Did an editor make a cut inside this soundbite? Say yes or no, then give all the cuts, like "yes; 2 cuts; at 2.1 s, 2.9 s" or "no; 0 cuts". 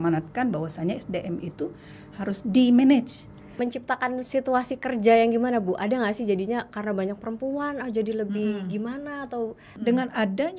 yes; 2 cuts; at 3.4 s, 9.6 s